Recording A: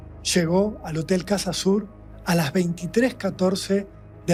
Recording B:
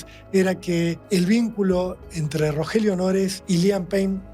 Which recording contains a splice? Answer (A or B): B